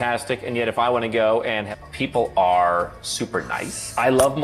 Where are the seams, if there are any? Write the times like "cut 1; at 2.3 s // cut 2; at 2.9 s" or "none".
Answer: cut 1; at 1.7 s